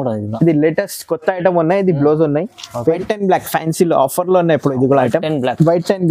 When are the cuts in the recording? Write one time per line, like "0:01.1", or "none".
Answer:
0:03.0